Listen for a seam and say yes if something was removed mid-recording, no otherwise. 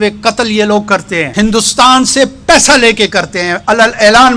yes